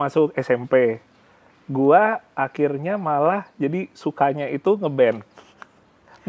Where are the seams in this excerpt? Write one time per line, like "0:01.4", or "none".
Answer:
none